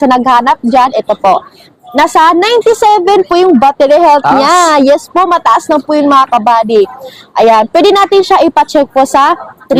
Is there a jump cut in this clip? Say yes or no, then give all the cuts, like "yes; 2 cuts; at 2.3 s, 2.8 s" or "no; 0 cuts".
no; 0 cuts